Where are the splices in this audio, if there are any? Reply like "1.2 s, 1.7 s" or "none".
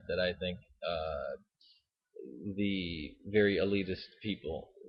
1.4 s

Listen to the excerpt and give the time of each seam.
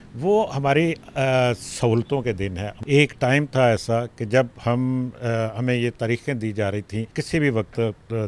2.7 s, 7.1 s

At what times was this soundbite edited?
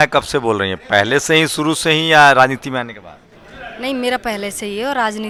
none

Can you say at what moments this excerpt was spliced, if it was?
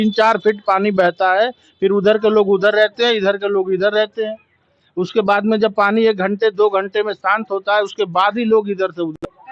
none

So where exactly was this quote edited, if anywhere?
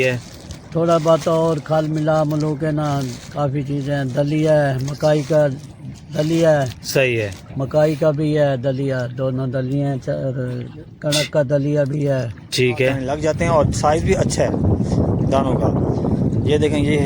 13.1 s

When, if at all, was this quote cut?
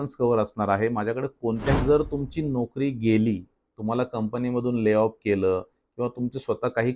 1.8 s

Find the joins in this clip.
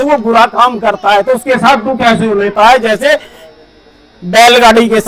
none

